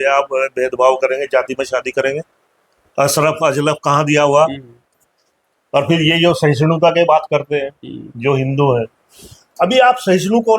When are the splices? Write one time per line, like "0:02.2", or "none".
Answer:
0:04.8